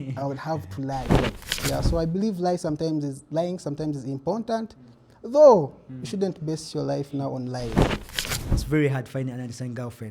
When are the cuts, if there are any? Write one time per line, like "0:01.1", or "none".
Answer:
0:01.3
0:08.1